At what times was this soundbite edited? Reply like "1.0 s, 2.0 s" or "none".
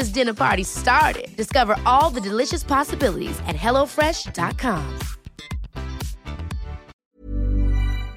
7.0 s